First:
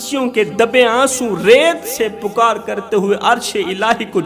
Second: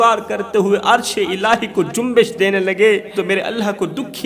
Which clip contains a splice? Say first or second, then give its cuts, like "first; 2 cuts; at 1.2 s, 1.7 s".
second; 1 cut; at 3.1 s